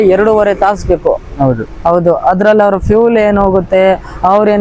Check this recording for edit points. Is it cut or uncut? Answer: uncut